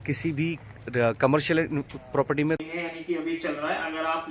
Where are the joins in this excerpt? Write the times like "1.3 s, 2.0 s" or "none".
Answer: 2.6 s